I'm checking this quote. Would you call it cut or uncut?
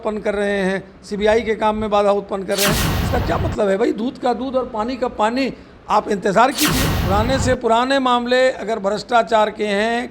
cut